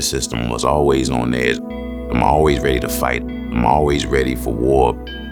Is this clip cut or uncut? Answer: uncut